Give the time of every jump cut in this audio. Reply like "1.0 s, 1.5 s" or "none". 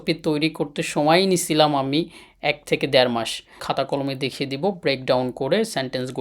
3.6 s